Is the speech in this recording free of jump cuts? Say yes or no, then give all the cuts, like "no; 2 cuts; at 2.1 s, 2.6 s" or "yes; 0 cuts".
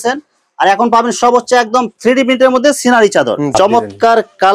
no; 1 cut; at 3.5 s